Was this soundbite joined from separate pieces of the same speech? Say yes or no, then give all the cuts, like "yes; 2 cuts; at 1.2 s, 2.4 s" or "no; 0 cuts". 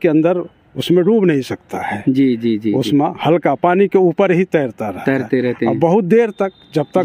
no; 0 cuts